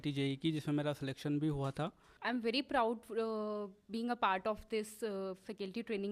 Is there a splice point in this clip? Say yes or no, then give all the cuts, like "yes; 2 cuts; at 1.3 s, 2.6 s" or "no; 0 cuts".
yes; 1 cut; at 2.1 s